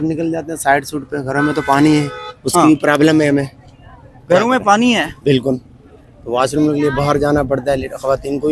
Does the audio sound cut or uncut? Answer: uncut